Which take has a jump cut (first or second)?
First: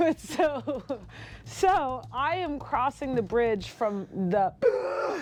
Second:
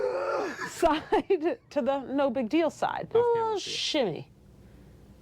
second